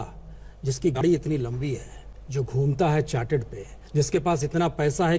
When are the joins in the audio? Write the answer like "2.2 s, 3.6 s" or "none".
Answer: 1.0 s, 3.8 s